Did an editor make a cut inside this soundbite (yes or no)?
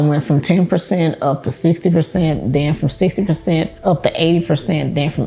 yes